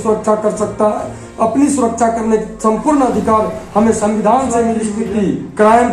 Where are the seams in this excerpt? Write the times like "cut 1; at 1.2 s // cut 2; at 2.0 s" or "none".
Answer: cut 1; at 4.9 s